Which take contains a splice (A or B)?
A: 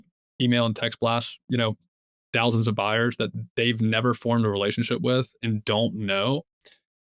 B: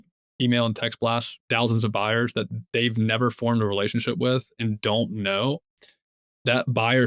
B